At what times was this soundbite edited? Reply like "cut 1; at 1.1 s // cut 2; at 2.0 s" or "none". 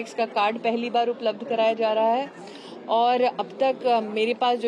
none